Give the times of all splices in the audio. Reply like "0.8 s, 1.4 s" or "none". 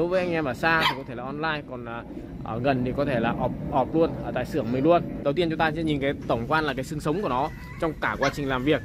5.1 s